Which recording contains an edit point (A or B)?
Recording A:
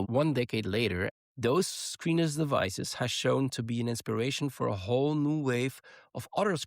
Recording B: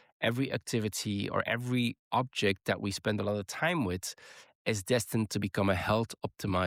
A